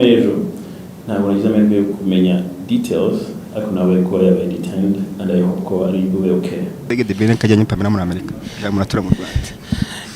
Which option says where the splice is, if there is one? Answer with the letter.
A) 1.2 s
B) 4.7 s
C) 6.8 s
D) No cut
C